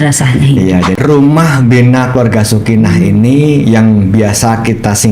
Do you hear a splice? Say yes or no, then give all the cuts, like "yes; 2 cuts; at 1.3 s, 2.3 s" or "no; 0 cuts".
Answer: yes; 1 cut; at 0.9 s